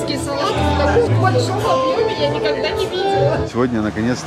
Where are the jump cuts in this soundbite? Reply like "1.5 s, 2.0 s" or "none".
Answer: 1.1 s, 3.5 s